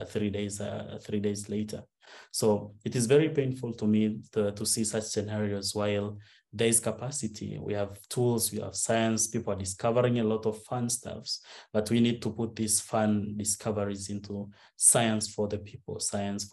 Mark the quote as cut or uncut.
uncut